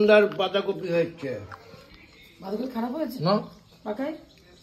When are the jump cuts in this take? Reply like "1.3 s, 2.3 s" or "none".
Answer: none